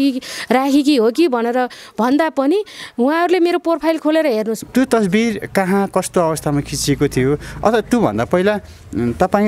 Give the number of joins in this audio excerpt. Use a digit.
1